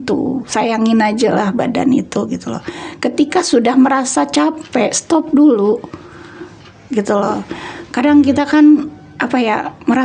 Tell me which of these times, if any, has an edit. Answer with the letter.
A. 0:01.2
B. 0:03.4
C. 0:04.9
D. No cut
D